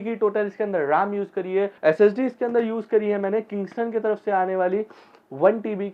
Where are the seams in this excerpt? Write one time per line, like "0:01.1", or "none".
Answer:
0:01.7